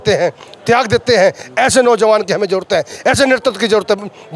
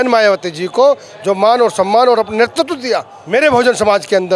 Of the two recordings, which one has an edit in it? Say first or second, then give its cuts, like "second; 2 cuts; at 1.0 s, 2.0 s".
second; 1 cut; at 3.1 s